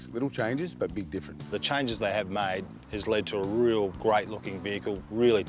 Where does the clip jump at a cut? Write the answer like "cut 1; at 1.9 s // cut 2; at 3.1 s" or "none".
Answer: cut 1; at 1.5 s // cut 2; at 4.0 s